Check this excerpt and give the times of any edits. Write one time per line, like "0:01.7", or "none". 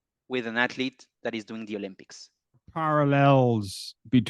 0:02.7